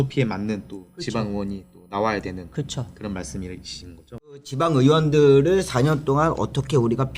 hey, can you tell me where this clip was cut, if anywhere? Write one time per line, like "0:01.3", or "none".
0:04.4